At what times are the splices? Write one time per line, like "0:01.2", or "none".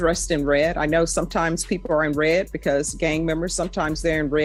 none